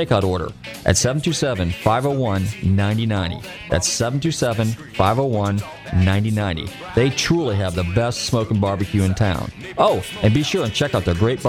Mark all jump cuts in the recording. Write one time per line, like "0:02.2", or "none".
none